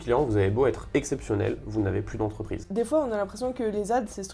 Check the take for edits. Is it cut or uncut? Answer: cut